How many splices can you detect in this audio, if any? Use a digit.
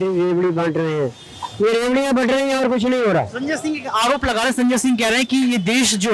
0